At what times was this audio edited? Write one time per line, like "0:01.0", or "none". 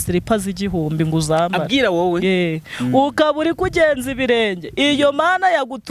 none